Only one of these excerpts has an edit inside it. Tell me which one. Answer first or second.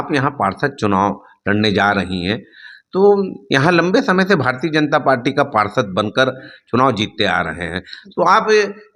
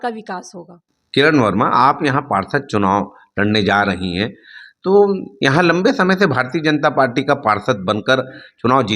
second